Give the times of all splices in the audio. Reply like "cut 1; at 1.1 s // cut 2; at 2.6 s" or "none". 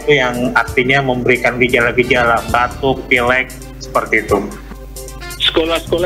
cut 1; at 4.8 s